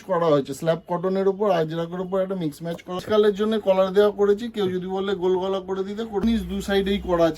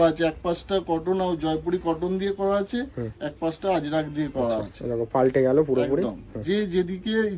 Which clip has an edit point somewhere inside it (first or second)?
first